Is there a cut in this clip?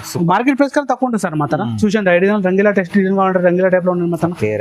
no; 0 cuts

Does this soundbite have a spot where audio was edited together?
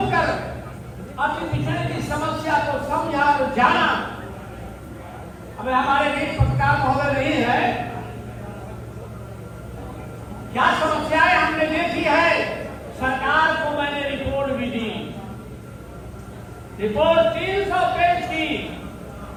no; 0 cuts

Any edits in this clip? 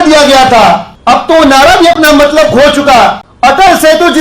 yes; 2 cuts; at 0.9 s, 3.3 s

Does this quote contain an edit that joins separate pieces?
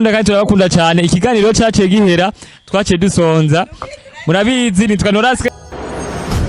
yes; 1 cut; at 5.5 s

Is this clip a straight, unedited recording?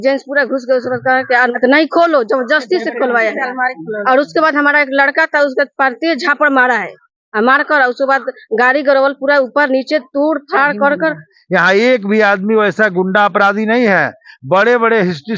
no; 2 cuts; at 1.5 s, 11.3 s

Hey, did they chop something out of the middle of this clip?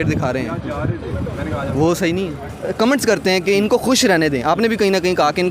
yes; 1 cut; at 2.5 s

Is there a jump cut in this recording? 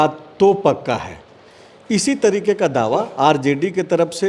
no; 0 cuts

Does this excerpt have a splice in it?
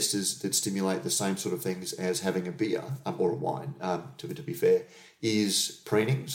no; 0 cuts

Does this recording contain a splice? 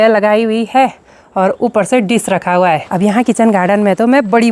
yes; 1 cut; at 2.9 s

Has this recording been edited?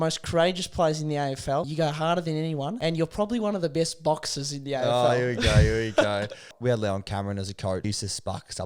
yes; 4 cuts; at 1.7 s, 2.8 s, 6.5 s, 7.8 s

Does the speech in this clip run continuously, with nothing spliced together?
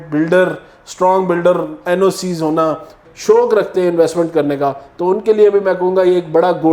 no; 1 cut; at 3.0 s

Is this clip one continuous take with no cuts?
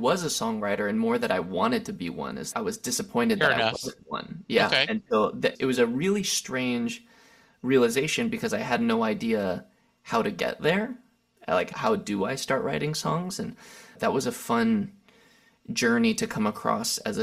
yes; 0 cuts

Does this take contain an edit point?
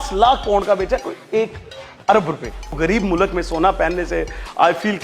yes; 1 cut; at 2.8 s

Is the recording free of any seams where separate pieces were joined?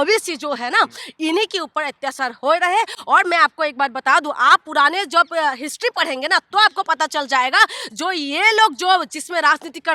yes; 0 cuts

